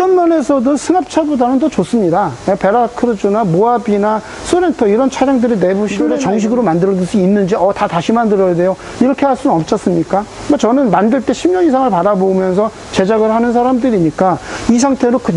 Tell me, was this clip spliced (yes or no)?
yes